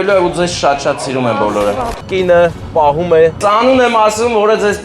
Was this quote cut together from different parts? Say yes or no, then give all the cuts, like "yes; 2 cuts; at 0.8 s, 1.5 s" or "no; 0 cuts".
yes; 2 cuts; at 1.9 s, 3.4 s